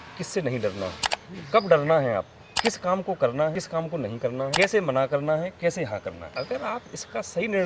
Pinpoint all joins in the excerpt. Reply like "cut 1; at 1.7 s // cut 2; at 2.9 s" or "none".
cut 1; at 2.4 s // cut 2; at 4.1 s // cut 3; at 6.2 s